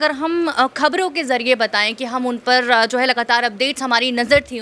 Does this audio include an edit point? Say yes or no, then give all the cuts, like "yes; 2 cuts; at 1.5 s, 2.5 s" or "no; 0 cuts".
no; 0 cuts